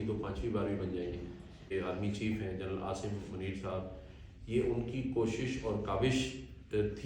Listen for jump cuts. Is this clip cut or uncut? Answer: cut